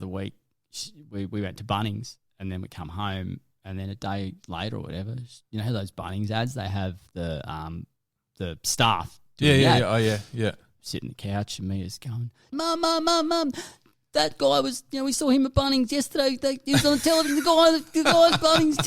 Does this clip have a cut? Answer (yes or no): yes